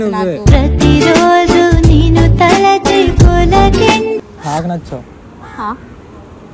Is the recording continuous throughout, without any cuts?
yes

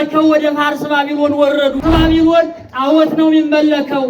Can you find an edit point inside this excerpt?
yes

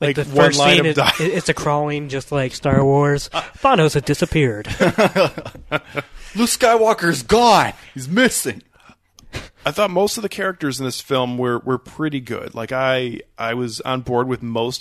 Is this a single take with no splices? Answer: yes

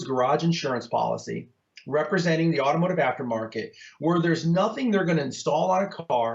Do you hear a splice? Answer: no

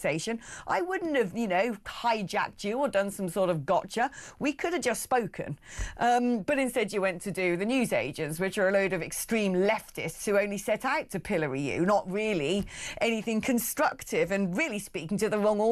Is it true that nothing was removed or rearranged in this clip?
yes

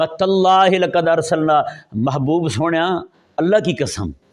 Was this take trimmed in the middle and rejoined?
no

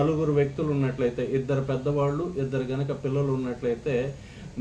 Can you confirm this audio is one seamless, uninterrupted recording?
yes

